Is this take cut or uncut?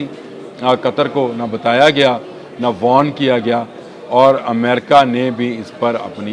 uncut